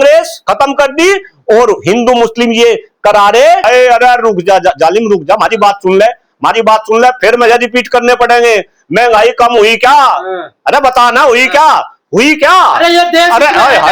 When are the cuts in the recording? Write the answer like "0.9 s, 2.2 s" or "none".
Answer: 3.6 s